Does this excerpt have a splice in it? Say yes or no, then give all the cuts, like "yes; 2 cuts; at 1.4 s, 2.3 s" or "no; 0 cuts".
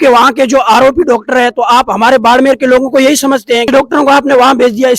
yes; 1 cut; at 3.7 s